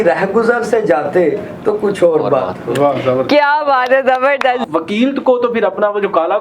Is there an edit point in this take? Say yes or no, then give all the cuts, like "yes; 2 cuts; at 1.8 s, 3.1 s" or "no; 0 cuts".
yes; 1 cut; at 4.6 s